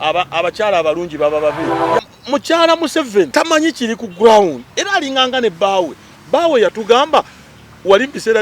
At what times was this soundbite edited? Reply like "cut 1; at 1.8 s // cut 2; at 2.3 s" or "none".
cut 1; at 2.0 s // cut 2; at 3.3 s